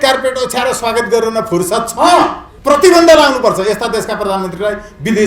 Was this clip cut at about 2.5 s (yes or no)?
yes